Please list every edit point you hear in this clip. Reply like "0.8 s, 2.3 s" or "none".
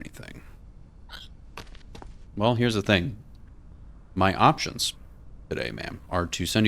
2.2 s